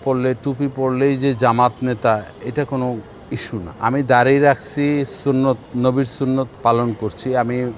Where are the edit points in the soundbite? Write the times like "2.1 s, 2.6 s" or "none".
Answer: 3.7 s, 6.5 s